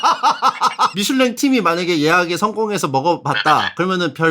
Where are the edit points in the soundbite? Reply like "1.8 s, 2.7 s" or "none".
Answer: 0.9 s